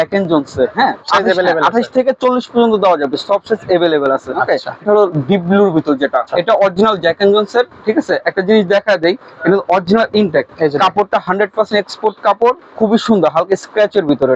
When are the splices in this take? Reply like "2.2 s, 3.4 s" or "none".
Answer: 1.0 s, 4.8 s, 6.3 s, 10.5 s